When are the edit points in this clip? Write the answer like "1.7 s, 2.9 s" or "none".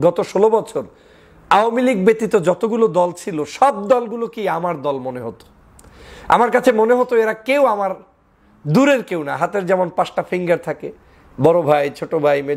none